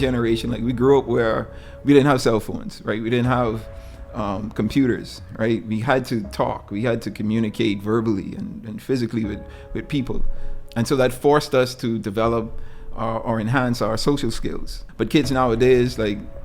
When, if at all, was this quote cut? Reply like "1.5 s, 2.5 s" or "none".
10.5 s, 14.8 s